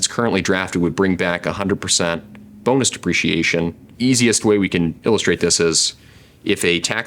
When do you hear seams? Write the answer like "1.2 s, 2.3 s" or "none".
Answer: 3.8 s